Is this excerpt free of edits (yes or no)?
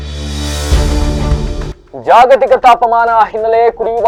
yes